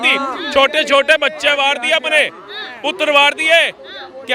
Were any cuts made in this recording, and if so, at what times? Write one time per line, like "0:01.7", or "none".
none